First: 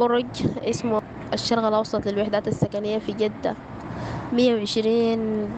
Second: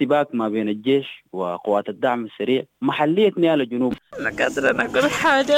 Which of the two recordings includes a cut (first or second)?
second